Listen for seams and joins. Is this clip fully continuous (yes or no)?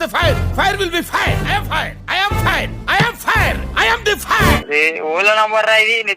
no